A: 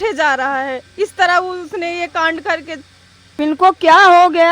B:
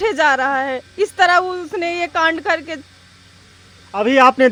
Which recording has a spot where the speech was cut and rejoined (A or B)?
A